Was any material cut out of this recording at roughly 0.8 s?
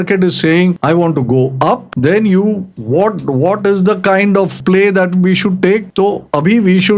yes; 5 cuts; at 0.8 s, 1.9 s, 2.7 s, 4.6 s, 5.9 s

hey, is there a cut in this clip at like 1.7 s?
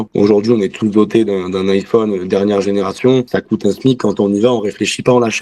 no; 1 cut; at 3.3 s

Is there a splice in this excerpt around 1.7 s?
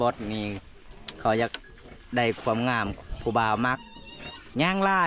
no; 1 cut; at 2.9 s

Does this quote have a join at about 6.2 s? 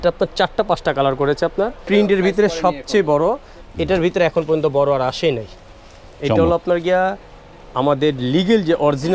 no; 1 cut; at 1.8 s

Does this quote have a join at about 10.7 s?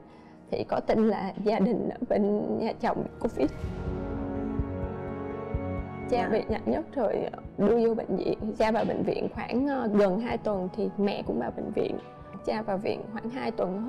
no; 1 cut; at 12.3 s

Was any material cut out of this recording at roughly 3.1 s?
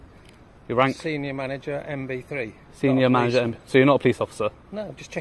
no; 0 cuts

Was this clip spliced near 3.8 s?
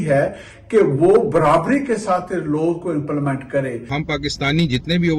yes; 1 cut; at 3.8 s

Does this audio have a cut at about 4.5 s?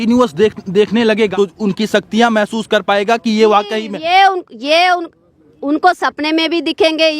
no; 1 cut; at 1.3 s

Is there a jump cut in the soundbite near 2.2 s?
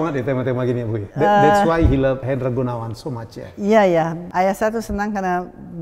yes; 3 cuts; at 1.0 s, 2.2 s, 4.2 s

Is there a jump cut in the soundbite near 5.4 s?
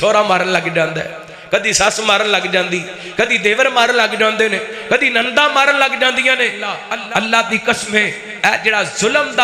no; 1 cut; at 6.9 s

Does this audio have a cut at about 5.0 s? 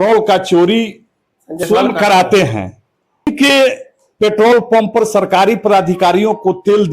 no; 2 cuts; at 1.6 s, 3.3 s

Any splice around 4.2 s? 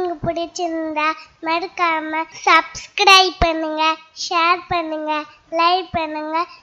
no; 1 cut; at 2.3 s

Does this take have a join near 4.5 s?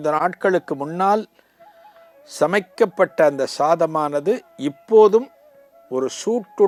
no; 0 cuts

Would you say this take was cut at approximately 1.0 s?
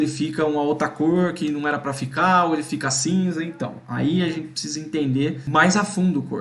no; 1 cut; at 5.4 s

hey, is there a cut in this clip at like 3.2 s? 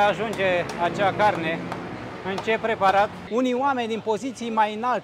yes; 1 cut; at 3.2 s

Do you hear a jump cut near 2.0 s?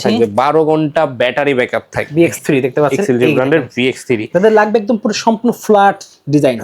yes; 1 cut; at 2.0 s

